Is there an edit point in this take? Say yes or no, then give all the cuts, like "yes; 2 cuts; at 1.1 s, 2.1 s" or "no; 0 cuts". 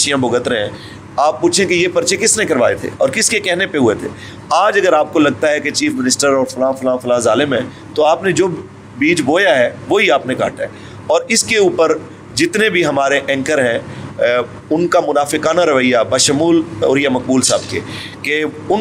no; 0 cuts